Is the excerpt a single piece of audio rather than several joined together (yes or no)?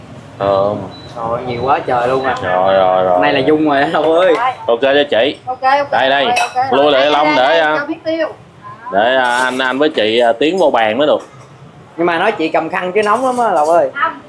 yes